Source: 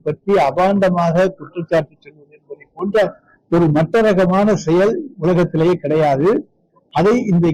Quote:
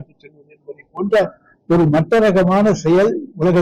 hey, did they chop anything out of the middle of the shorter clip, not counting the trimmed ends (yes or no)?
no